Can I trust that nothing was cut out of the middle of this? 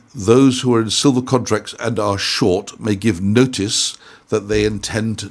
yes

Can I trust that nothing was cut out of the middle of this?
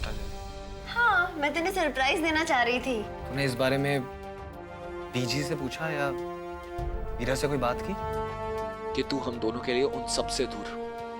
no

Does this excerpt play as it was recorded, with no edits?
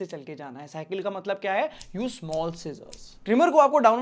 yes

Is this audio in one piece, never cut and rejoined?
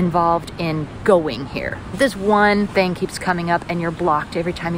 no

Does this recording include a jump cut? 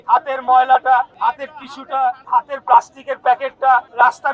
no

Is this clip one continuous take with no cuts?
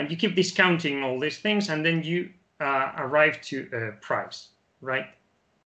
yes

